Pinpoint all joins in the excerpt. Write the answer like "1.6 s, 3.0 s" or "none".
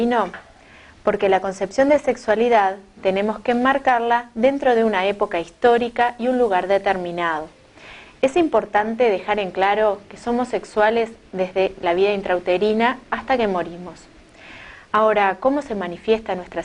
none